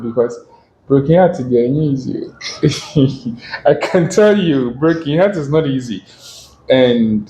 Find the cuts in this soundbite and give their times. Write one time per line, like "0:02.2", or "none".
none